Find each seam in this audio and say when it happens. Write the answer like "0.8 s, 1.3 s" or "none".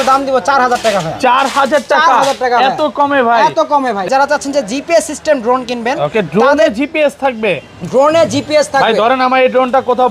4.1 s